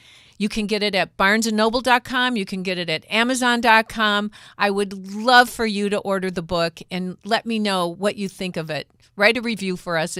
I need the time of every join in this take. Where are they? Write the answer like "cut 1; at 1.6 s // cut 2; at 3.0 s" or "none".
none